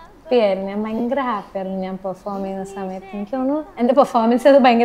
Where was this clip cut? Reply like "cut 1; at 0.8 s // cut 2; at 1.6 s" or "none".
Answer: none

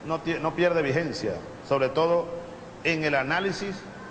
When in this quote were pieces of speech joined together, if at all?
cut 1; at 2.8 s

